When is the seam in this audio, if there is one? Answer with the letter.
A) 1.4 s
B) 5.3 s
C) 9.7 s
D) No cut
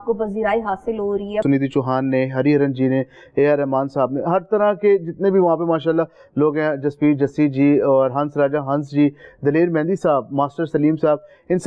A